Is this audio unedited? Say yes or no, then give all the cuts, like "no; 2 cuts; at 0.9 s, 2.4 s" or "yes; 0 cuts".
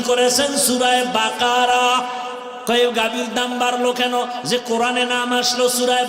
no; 1 cut; at 2.5 s